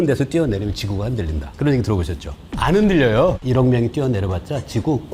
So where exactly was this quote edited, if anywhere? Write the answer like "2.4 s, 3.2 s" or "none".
2.5 s, 3.4 s